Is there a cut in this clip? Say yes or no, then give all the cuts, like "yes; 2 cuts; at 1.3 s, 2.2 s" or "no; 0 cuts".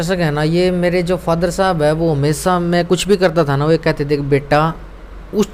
no; 0 cuts